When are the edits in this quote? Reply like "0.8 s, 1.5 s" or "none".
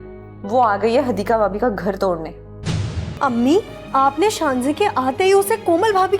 3.0 s